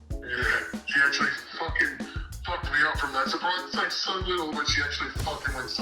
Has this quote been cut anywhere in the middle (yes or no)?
no